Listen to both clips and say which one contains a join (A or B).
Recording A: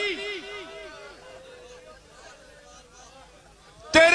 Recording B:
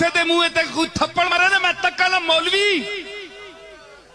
B